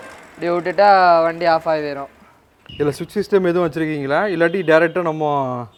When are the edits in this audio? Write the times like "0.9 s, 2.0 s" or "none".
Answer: none